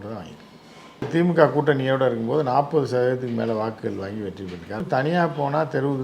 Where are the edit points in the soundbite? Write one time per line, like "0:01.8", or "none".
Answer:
0:01.1
0:04.8